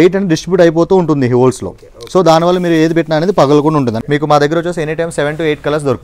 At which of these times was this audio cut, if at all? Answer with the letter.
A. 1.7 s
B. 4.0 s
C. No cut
B